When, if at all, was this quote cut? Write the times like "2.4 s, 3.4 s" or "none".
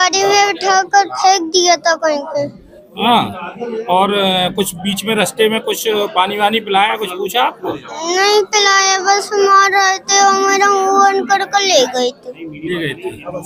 none

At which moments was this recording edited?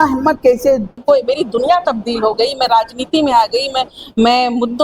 0.9 s

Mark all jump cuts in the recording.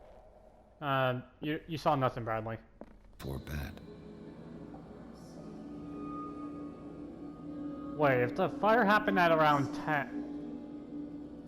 3.2 s

